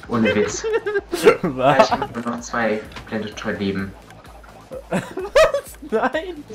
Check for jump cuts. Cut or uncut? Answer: uncut